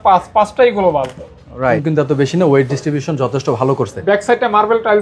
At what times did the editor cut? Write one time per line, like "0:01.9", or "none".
0:01.8